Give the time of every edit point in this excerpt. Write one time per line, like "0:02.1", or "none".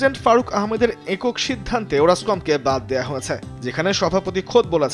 none